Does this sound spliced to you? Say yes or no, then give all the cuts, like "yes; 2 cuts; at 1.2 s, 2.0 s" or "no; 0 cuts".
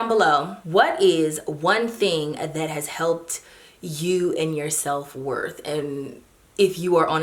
no; 0 cuts